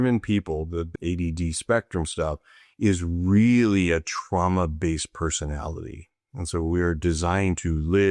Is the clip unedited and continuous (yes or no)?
no